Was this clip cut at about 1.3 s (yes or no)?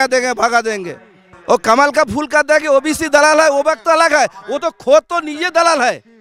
yes